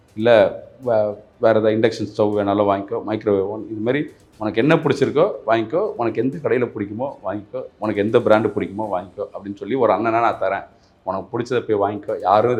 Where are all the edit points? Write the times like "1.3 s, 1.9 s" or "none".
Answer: none

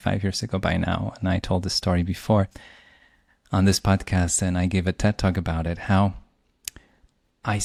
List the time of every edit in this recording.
none

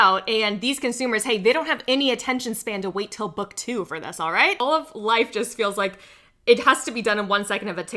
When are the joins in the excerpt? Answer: 4.6 s

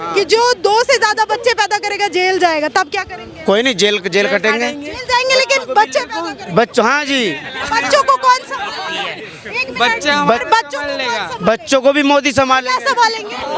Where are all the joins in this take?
none

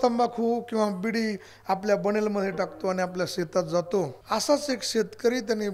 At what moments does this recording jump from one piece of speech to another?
4.2 s

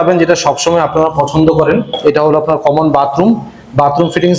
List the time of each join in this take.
1.9 s

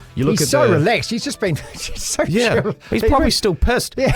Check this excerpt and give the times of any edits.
none

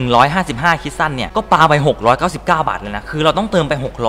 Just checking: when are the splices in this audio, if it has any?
none

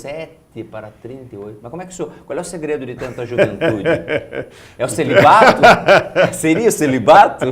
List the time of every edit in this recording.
5.6 s

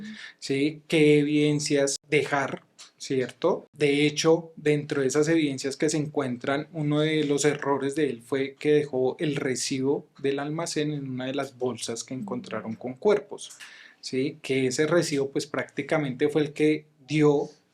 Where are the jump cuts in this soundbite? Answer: 2.0 s, 3.7 s

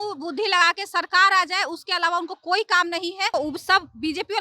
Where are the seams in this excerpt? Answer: 3.3 s

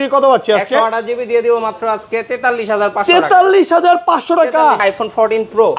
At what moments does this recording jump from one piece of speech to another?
4.8 s

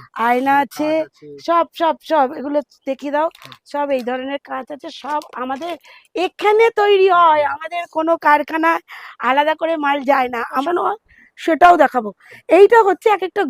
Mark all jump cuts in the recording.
10.6 s

